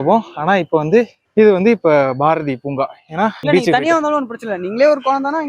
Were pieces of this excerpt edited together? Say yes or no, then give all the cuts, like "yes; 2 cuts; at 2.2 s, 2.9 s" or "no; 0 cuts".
yes; 1 cut; at 3.4 s